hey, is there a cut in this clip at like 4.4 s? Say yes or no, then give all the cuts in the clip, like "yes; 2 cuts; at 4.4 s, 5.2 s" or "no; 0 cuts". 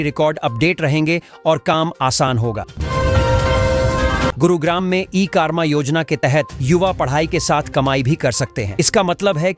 yes; 2 cuts; at 2.7 s, 4.4 s